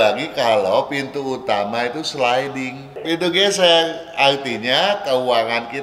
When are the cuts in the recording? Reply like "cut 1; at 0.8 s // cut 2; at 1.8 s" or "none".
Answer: cut 1; at 3.0 s